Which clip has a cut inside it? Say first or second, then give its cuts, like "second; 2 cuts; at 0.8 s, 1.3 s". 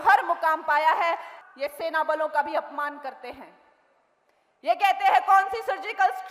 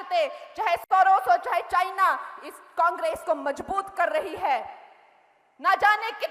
first; 1 cut; at 1.3 s